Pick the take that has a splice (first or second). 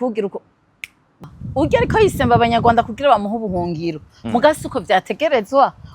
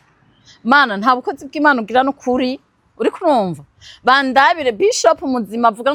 first